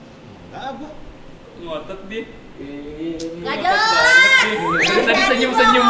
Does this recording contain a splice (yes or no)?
yes